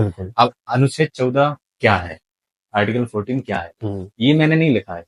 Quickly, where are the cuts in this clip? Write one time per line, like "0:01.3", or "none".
none